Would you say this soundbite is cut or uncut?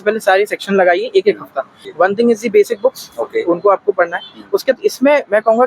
cut